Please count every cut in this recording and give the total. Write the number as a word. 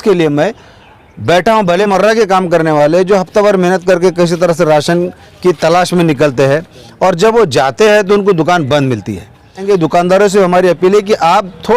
two